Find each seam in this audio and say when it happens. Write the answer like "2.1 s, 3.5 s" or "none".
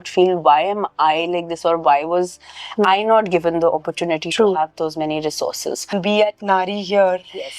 5.9 s